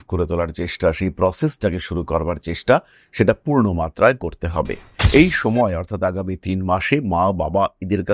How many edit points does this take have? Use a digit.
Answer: 1